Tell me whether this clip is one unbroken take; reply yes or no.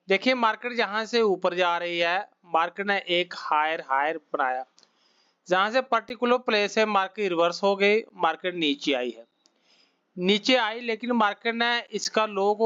yes